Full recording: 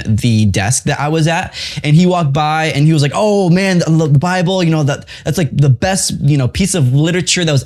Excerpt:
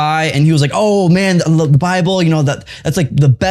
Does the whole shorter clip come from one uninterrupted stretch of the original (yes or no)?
yes